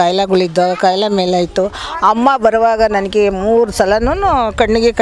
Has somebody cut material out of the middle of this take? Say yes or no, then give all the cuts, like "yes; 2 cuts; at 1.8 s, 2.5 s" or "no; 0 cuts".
no; 0 cuts